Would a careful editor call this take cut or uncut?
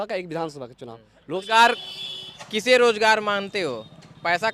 cut